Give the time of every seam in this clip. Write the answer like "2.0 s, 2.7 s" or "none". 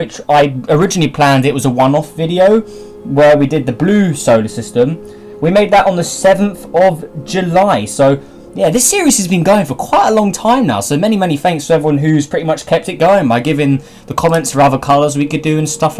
11.9 s